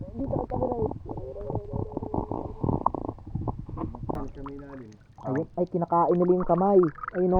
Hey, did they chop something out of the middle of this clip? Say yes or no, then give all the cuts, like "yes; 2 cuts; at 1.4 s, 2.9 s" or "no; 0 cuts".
yes; 1 cut; at 4.2 s